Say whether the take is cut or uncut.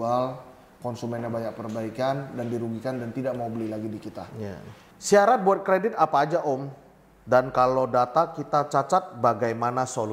cut